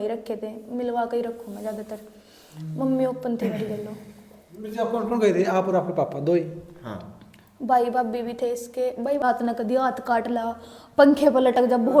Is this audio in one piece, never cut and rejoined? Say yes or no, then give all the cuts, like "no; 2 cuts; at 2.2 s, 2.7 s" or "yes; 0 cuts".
no; 1 cut; at 9.2 s